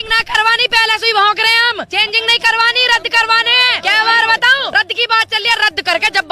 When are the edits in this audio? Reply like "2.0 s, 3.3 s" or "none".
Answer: 1.9 s, 3.7 s, 4.7 s